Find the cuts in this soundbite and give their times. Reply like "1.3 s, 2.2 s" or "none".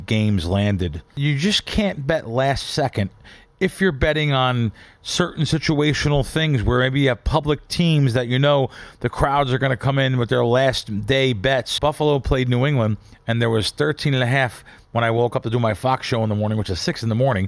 1.2 s, 11.7 s

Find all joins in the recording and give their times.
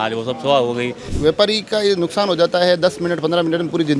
1.0 s

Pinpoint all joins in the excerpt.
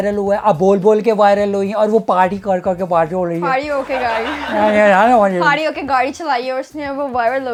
none

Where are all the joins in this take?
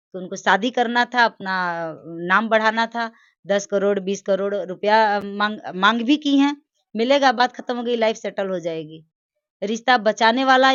none

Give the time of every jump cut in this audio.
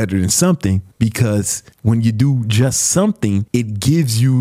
0.9 s, 1.6 s, 3.5 s

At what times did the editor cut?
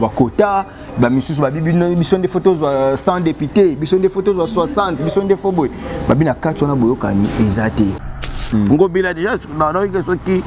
8.1 s

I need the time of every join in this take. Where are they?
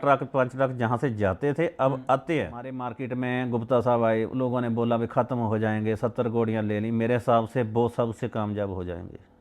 2.9 s

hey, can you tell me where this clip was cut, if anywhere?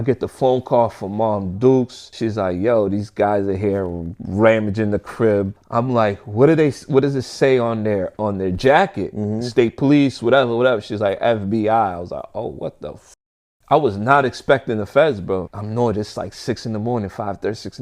2.0 s, 8.1 s

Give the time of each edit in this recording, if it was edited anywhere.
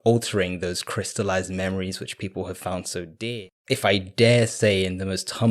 3.2 s

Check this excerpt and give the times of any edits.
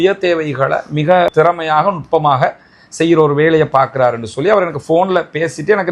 1.3 s

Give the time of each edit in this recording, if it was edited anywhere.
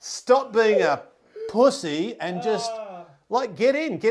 none

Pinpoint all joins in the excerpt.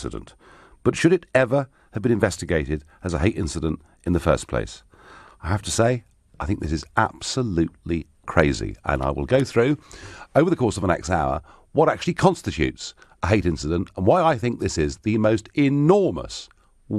none

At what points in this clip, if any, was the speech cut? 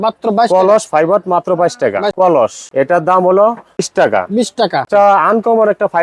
2.3 s, 3.9 s, 4.9 s

